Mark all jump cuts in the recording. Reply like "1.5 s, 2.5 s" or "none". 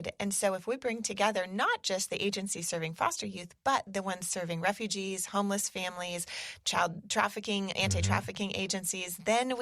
none